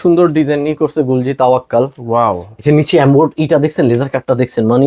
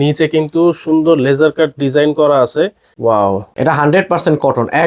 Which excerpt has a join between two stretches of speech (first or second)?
second